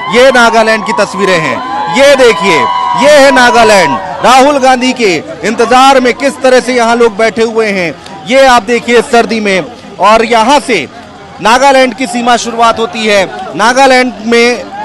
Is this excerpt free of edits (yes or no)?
yes